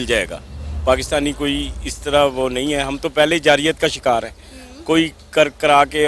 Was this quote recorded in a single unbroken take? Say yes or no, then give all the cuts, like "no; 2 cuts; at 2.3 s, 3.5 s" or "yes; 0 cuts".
yes; 0 cuts